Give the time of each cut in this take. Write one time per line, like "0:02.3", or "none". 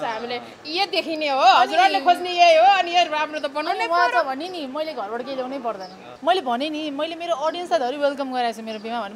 0:06.1